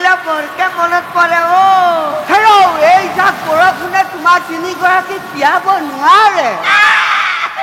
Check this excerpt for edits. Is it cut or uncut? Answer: uncut